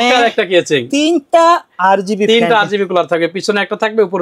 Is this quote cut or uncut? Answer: uncut